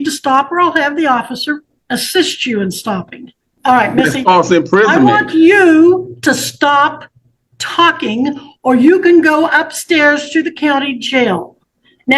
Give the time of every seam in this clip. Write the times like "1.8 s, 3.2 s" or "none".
1.7 s, 3.4 s

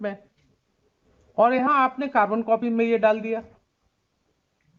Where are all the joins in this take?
none

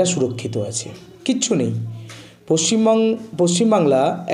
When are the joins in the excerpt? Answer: none

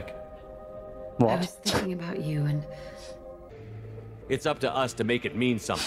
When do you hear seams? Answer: 3.5 s

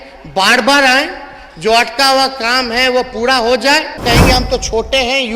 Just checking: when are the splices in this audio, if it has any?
4.0 s

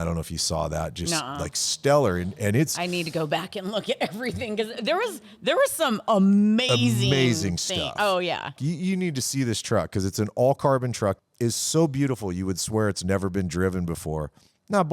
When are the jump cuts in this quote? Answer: 8.6 s, 11.2 s

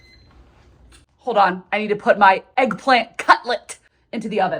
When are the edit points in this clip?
none

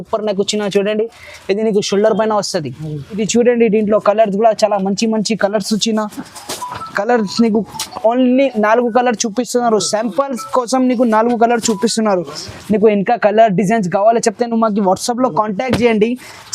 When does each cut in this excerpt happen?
3.2 s

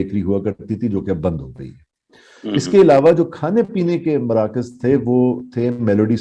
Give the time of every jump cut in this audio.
none

